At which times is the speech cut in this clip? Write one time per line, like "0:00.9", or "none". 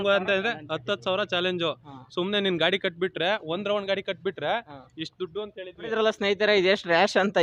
0:05.9